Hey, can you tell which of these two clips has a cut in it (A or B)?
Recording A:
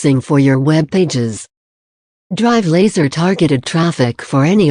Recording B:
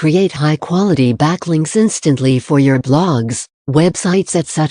B